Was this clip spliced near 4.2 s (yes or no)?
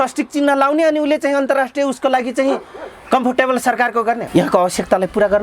yes